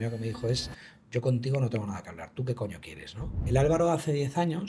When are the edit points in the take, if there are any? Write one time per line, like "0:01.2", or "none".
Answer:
0:03.4